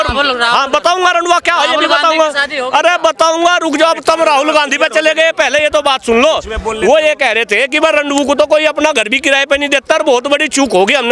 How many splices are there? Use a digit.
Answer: 0